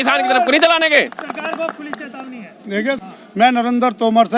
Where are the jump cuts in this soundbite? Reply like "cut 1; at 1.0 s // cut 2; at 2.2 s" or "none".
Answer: cut 1; at 3.0 s